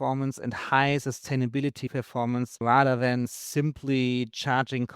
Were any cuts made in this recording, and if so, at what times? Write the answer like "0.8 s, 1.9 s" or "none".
2.6 s